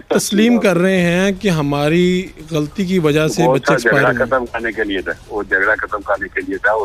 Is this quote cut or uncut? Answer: uncut